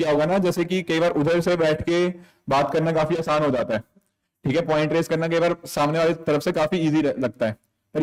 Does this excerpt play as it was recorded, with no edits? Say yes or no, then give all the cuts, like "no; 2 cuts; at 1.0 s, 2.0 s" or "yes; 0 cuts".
yes; 0 cuts